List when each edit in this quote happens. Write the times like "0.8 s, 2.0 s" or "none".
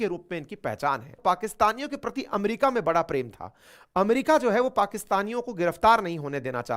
1.1 s